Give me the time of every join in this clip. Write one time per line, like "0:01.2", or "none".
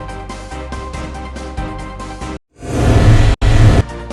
0:01.1